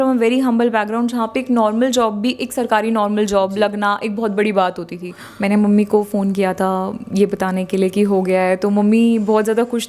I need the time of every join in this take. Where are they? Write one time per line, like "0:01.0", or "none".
0:05.2